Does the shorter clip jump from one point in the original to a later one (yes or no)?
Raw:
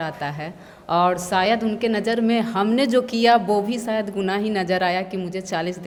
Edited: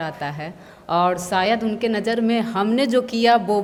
no